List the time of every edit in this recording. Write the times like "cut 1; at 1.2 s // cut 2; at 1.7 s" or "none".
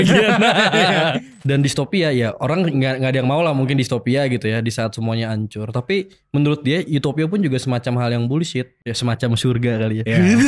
cut 1; at 1.3 s // cut 2; at 8.9 s